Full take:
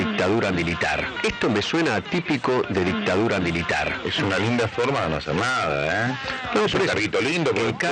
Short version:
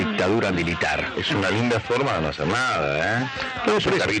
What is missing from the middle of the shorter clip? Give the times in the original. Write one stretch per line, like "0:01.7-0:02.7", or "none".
0:01.0-0:03.9